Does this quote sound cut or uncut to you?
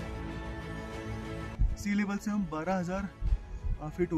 cut